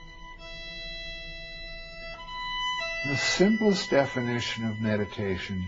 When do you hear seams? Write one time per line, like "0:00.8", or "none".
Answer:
none